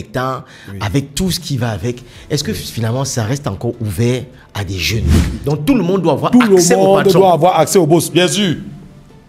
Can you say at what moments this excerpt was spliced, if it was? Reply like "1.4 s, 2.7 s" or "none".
5.3 s